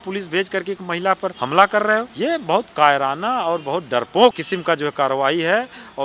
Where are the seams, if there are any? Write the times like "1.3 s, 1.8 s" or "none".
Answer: 1.4 s, 2.1 s, 4.4 s